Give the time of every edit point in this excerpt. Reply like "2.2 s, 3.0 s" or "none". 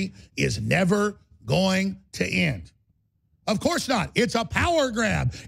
none